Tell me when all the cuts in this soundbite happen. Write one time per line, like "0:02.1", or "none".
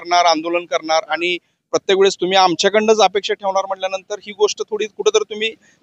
none